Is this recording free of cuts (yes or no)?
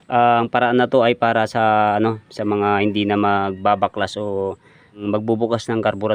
no